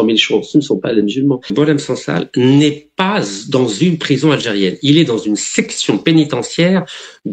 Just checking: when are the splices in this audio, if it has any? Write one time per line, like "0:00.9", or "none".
0:01.5